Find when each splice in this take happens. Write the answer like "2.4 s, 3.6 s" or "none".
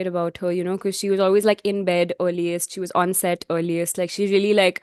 none